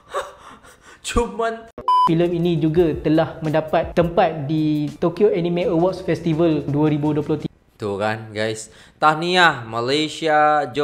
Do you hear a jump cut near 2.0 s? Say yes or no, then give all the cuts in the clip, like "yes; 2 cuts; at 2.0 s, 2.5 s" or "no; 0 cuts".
yes; 1 cut; at 2.0 s